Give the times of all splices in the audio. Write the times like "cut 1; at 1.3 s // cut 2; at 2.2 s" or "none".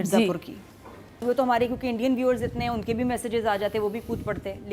cut 1; at 1.2 s